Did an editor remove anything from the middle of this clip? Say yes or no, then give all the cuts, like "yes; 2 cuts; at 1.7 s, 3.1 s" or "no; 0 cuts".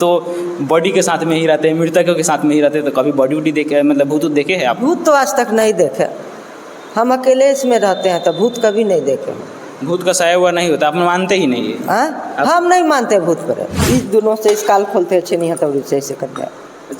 yes; 1 cut; at 13.8 s